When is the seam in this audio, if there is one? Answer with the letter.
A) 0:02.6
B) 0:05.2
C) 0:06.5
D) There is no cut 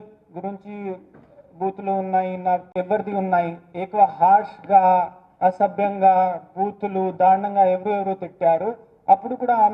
A